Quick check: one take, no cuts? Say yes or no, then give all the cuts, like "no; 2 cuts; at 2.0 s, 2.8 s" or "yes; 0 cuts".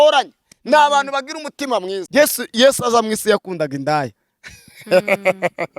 no; 1 cut; at 2.0 s